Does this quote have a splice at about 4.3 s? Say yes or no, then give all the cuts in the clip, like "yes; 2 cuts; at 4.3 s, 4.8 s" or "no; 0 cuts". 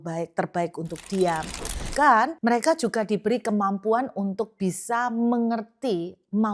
no; 2 cuts; at 1.9 s, 2.3 s